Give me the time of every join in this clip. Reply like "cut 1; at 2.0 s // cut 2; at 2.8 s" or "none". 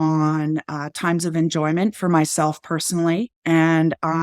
cut 1; at 3.3 s